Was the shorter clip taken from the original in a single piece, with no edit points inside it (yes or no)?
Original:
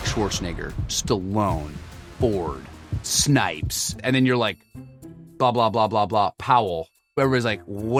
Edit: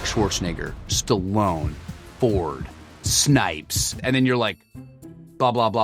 yes